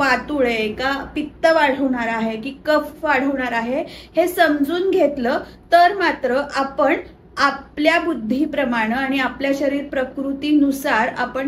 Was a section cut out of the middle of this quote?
no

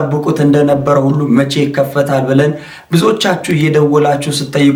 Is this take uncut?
yes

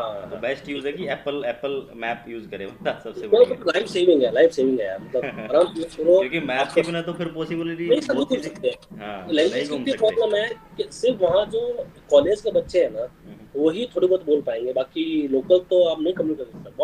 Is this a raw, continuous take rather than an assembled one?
yes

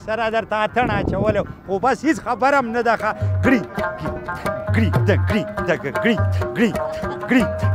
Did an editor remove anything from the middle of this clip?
no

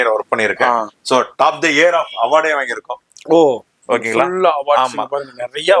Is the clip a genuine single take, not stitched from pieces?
yes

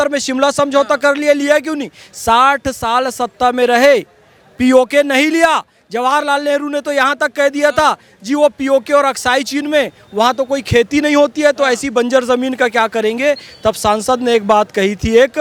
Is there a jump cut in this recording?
no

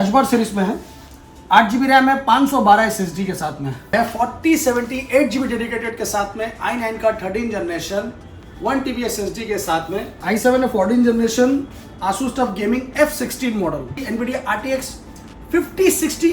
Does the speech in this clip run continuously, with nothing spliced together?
no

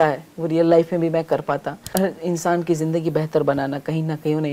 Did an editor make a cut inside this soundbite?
yes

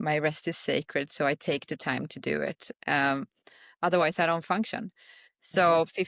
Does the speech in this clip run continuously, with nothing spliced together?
yes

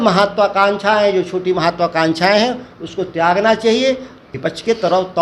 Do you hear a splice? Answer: yes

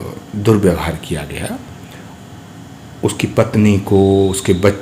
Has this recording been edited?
no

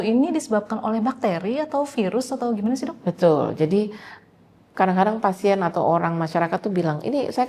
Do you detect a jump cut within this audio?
no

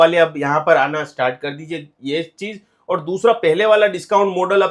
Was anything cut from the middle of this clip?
no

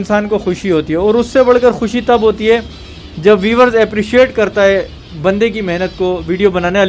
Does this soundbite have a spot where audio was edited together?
no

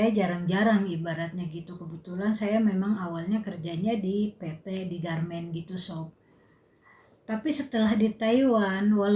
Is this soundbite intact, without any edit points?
yes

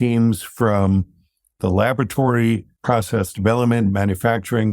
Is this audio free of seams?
no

